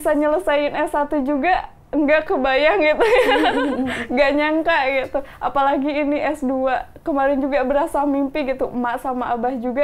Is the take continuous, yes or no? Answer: yes